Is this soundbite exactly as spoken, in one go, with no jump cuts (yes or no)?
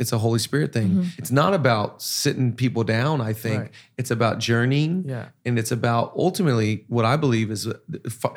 no